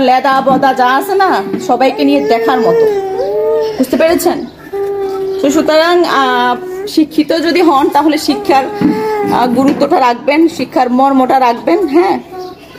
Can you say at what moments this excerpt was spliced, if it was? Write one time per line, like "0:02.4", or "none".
none